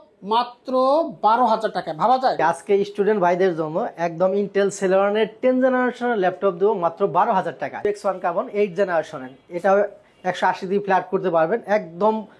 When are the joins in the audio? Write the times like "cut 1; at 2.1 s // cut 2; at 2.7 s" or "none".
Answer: cut 1; at 2.4 s // cut 2; at 7.8 s